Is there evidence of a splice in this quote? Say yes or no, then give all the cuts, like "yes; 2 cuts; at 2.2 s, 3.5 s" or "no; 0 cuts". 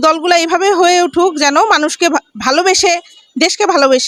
no; 0 cuts